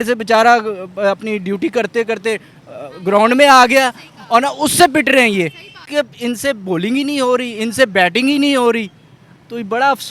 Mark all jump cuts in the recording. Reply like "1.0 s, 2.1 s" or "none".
5.8 s